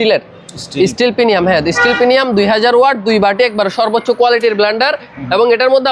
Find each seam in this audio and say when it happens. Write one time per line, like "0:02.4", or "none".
none